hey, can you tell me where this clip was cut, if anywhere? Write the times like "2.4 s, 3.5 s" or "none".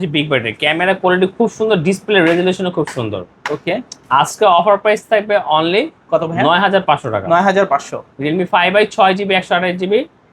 none